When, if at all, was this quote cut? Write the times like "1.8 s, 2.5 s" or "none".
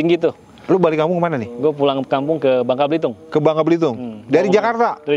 none